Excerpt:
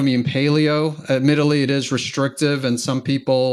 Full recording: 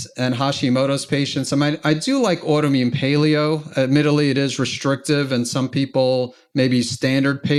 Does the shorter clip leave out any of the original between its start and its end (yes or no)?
no